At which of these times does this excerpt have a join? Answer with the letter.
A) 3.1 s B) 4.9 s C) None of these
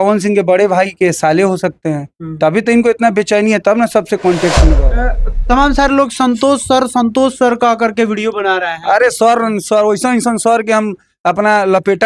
B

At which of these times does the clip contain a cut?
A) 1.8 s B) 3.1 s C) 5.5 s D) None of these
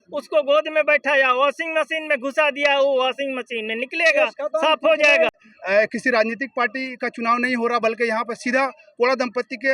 C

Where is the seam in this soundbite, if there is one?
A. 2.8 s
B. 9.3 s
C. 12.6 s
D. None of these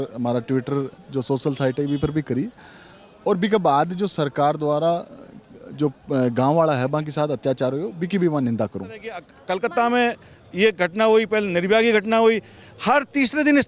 B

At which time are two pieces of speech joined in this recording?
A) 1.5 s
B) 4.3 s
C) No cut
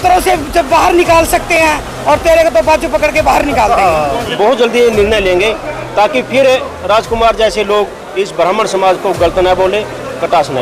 B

